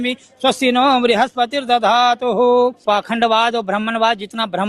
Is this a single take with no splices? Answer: no; 1 cut; at 2.8 s

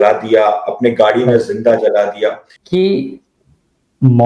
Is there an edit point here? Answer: yes; 1 cut; at 2.5 s

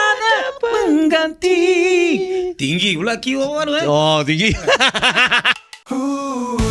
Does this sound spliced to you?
yes; 1 cut; at 5.4 s

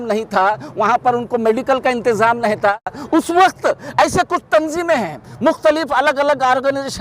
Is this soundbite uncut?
no; 1 cut; at 3.0 s

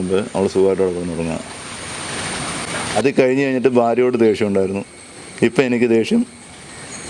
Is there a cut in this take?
yes; 1 cut; at 3.0 s

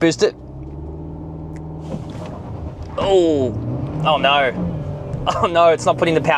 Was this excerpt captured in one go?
yes; 0 cuts

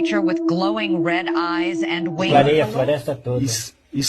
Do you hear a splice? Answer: yes; 1 cut; at 2.3 s

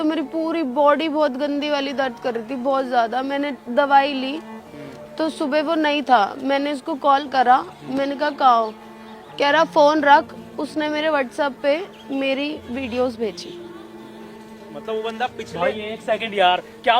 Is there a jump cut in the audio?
no; 0 cuts

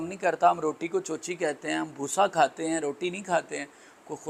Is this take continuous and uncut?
yes; 0 cuts

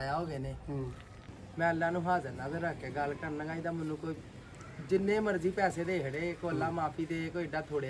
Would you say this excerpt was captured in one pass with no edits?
no; 1 cut; at 1.2 s

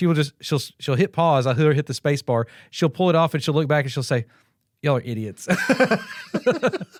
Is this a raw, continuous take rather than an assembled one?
yes; 0 cuts

